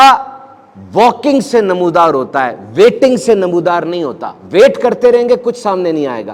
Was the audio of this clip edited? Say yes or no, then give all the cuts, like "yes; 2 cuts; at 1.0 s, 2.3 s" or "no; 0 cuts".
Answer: no; 0 cuts